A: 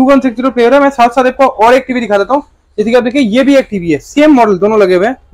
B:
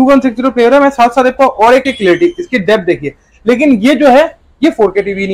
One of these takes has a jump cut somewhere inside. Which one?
B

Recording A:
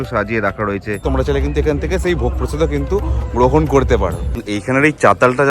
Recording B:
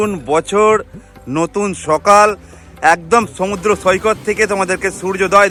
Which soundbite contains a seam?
A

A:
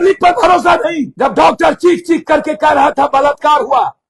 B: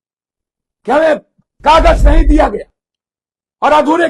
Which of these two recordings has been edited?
A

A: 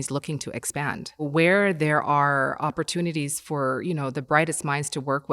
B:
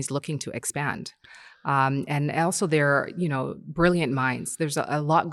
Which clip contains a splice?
A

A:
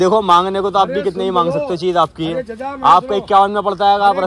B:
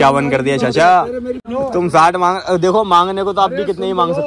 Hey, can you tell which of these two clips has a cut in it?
B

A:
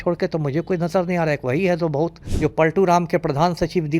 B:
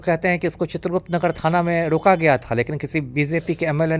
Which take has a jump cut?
A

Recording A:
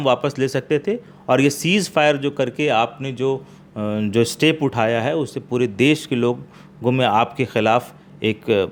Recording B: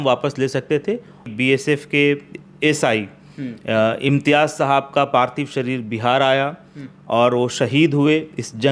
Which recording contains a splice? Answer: B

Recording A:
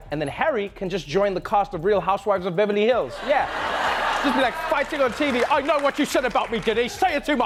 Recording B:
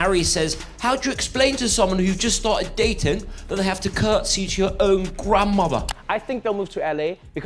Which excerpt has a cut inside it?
B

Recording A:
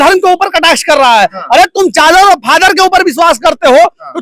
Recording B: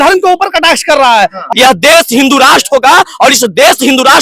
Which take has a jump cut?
B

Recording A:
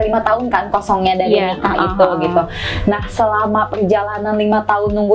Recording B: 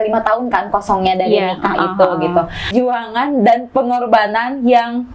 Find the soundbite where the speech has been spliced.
B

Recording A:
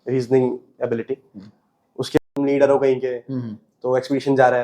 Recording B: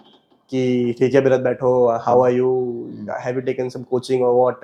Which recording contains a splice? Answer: A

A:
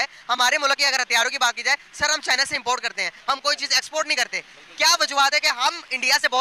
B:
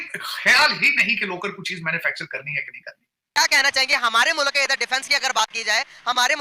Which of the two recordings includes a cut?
B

